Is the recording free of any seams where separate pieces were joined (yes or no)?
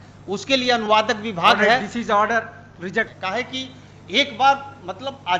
no